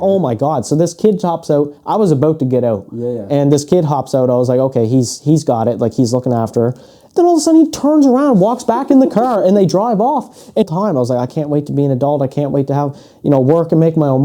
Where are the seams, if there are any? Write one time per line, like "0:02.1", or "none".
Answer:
0:10.6